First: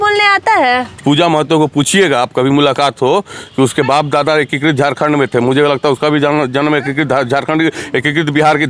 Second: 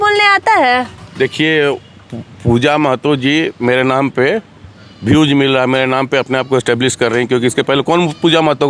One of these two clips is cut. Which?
first; 1 cut; at 0.9 s

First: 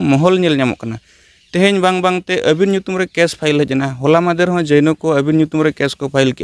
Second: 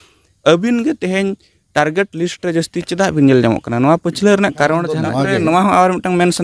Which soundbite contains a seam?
second; 1 cut; at 5.0 s

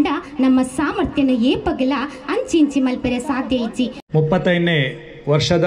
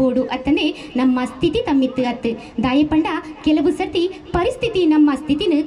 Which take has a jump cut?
first; 1 cut; at 4.0 s

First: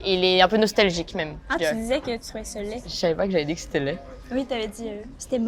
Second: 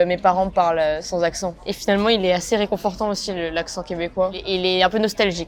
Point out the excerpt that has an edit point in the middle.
first; 1 cut; at 2.9 s

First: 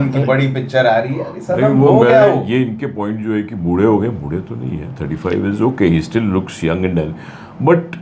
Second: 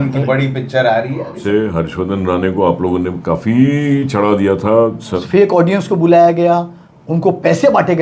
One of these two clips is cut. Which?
second; 2 cuts; at 1.3 s, 5.2 s

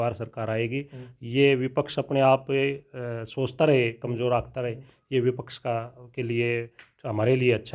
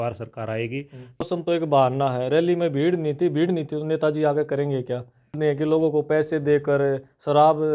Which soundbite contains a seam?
second; 2 cuts; at 1.3 s, 5.4 s

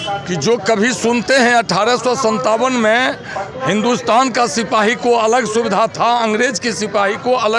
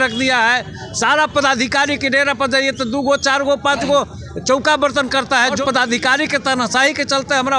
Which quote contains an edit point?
second; 1 cut; at 5.6 s

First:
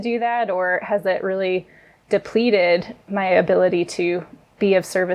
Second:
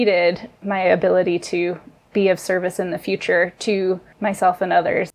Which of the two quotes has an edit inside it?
second; 1 cut; at 4.1 s

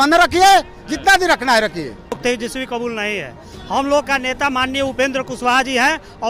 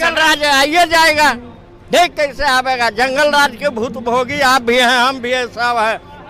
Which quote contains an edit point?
first; 1 cut; at 2.1 s

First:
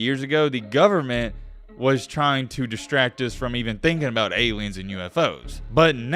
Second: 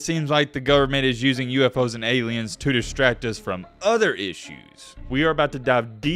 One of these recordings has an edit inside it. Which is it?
second; 1 cut; at 5.0 s

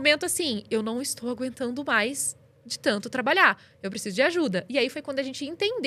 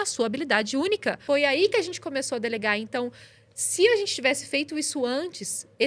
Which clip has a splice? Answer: second; 1 cut; at 1.2 s

